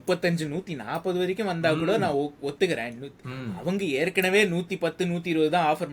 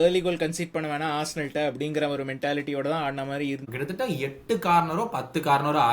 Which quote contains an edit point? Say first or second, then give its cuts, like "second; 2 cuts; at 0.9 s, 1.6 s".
second; 1 cut; at 3.6 s